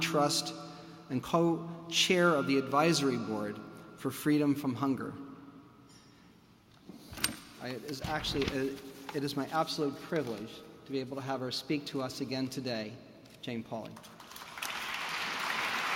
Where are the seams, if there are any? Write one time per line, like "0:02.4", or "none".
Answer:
none

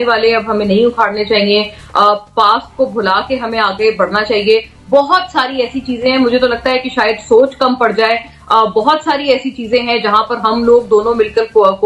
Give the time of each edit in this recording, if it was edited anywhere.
none

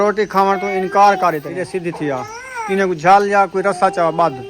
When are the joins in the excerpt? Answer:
0:01.6

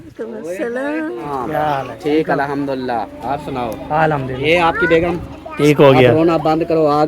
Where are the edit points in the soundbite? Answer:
0:01.2
0:04.4

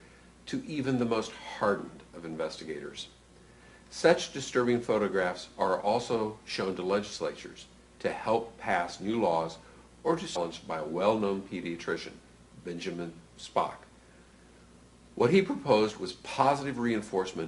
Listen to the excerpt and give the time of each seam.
none

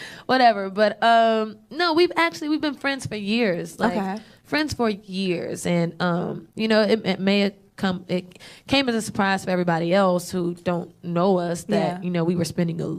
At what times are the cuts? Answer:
0:07.1

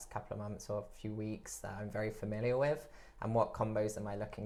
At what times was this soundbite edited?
none

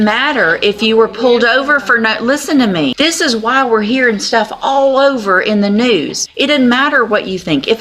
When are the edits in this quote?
0:02.9
0:06.2

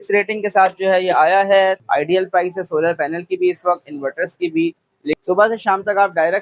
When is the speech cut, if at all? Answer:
0:01.8
0:05.2

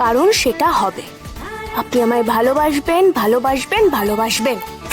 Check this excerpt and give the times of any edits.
none

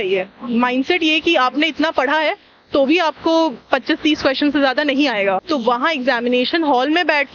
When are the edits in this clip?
0:05.4

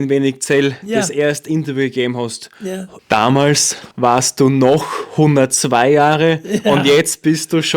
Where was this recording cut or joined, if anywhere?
0:02.9
0:03.8

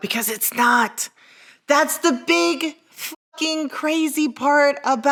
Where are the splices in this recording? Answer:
none

